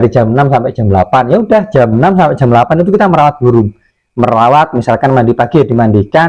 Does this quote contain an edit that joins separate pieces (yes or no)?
no